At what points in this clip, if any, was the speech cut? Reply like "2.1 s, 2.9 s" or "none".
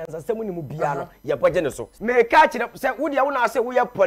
1.8 s